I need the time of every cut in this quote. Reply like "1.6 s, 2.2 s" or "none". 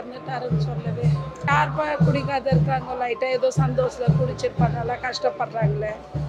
1.5 s